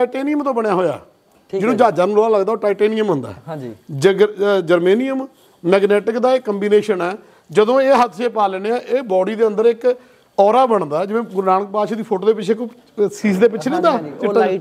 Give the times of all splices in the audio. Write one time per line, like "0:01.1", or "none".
none